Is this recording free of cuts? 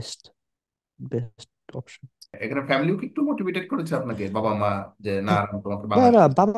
yes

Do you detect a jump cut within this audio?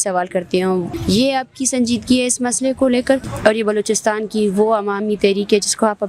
yes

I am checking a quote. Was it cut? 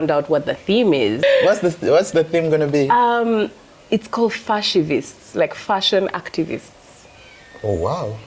yes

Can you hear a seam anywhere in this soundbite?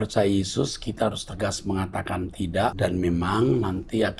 yes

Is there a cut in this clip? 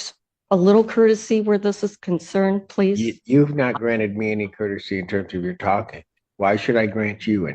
no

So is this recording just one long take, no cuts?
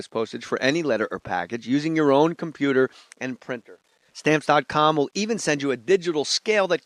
yes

